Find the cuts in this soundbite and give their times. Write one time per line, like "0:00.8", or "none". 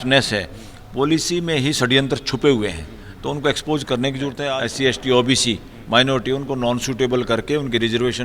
0:04.4